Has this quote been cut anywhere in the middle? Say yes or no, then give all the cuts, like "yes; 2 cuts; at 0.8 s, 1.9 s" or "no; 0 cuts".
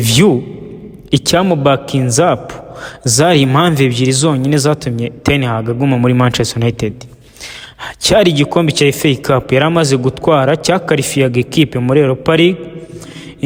no; 0 cuts